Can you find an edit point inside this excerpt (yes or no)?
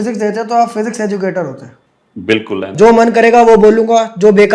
yes